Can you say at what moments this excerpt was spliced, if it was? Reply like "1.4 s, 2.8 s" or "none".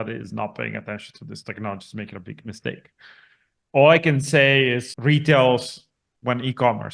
4.9 s